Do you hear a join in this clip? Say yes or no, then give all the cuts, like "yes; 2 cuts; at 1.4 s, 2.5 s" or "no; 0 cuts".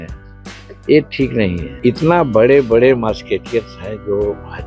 yes; 1 cut; at 1.7 s